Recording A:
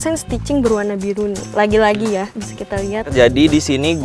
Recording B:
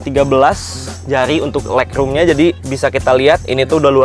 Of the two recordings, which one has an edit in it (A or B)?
A